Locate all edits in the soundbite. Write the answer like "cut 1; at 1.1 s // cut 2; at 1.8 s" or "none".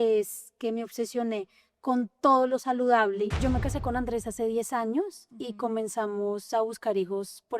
cut 1; at 3.4 s